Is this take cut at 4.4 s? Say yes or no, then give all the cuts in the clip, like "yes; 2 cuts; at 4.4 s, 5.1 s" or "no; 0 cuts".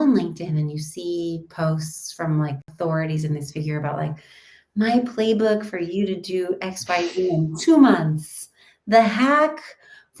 no; 1 cut; at 2.6 s